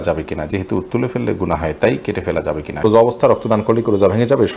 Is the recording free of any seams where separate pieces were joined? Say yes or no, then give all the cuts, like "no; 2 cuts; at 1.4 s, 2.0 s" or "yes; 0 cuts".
no; 1 cut; at 2.8 s